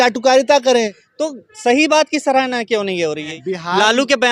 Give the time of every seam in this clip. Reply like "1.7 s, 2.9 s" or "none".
1.0 s, 3.3 s